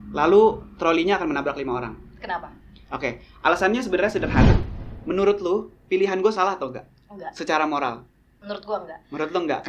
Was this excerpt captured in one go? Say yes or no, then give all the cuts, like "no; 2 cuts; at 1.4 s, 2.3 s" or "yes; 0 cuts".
no; 1 cut; at 4.6 s